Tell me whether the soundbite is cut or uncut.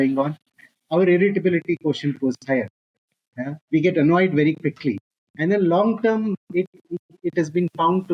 uncut